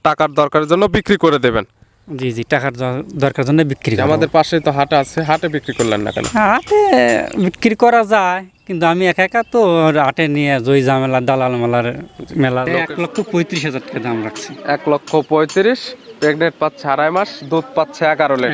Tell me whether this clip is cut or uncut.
cut